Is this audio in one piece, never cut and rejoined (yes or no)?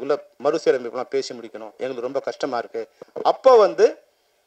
no